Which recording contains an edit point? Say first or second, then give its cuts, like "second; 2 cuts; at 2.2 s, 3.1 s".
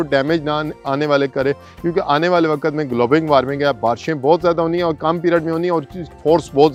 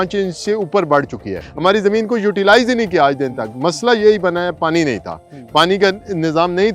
second; 1 cut; at 1.4 s